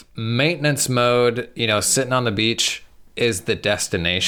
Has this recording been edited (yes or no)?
no